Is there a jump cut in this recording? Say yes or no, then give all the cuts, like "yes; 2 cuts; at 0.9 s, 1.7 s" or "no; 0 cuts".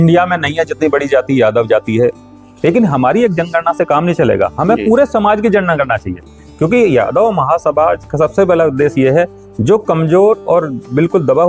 yes; 1 cut; at 2.1 s